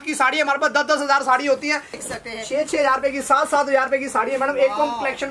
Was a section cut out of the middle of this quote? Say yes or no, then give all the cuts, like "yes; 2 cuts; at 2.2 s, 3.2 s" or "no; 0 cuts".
yes; 1 cut; at 2.0 s